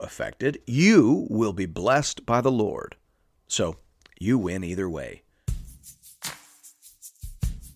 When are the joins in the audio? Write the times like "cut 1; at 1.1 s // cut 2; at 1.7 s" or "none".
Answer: cut 1; at 5.3 s